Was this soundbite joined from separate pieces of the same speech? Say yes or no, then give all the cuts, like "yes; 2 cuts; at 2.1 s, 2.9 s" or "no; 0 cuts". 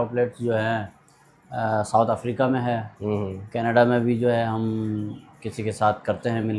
no; 0 cuts